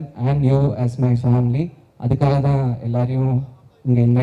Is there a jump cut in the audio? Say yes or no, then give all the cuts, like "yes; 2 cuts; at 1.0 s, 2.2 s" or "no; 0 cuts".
no; 0 cuts